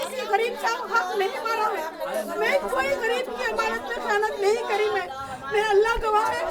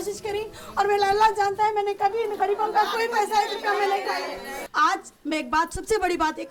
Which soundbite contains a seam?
second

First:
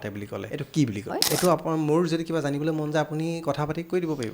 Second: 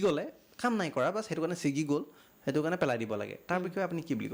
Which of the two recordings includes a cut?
first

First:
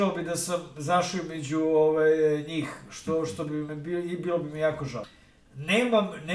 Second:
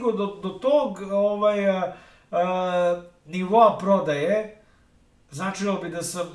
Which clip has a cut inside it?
first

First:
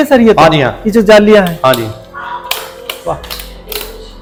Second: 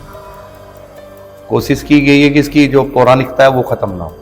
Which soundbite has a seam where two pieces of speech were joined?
second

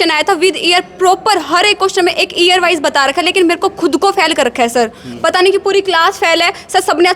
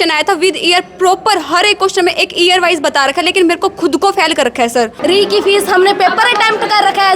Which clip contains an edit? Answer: second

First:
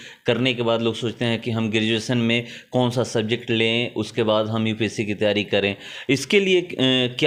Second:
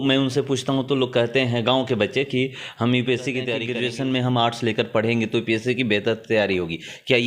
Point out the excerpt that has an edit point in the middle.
second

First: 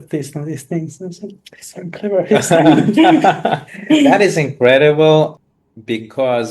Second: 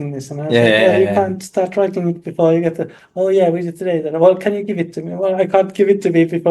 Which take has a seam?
first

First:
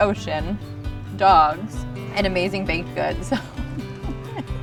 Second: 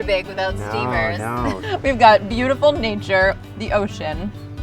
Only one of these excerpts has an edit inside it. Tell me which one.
second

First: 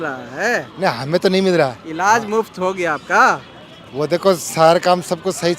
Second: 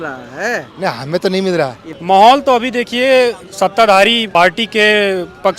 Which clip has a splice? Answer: second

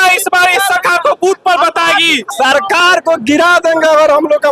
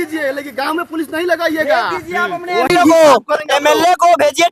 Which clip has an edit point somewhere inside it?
first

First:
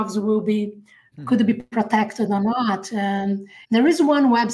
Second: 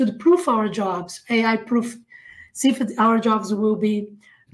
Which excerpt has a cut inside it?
first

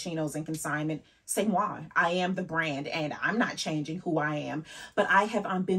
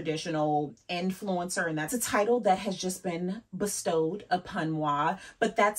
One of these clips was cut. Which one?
second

